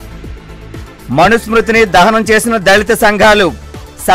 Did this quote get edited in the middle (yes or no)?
no